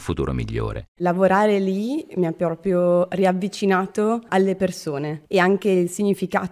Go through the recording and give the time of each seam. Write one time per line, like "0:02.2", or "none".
0:01.0

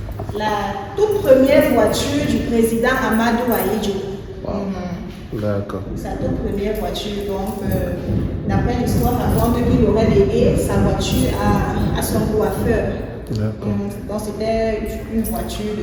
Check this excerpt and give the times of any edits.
none

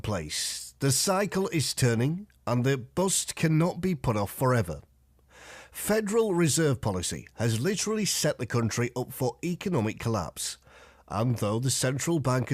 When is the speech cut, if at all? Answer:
0:05.7

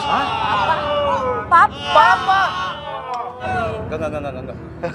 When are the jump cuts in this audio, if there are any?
0:03.5

